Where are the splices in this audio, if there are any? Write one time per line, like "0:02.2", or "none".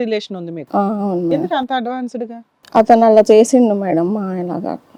none